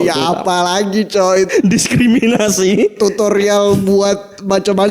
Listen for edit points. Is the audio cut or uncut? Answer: cut